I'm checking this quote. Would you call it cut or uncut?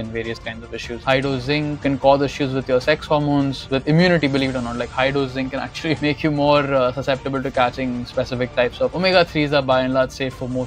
cut